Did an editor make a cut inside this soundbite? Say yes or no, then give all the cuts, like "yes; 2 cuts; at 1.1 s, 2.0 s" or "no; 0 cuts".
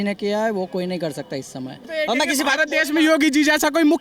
yes; 1 cut; at 1.9 s